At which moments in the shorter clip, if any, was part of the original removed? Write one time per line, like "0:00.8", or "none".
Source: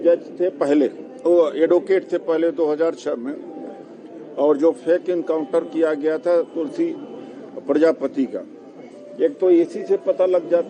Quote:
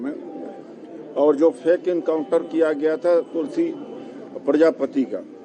none